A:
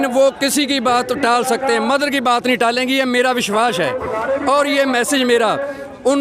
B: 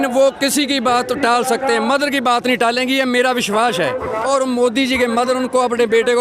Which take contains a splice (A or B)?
B